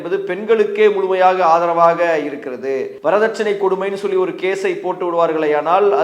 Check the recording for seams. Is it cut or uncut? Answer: cut